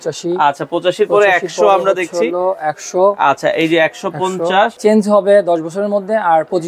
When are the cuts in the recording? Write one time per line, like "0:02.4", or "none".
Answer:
0:04.8